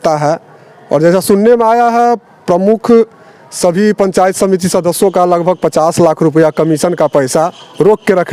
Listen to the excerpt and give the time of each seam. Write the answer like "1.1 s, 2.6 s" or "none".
none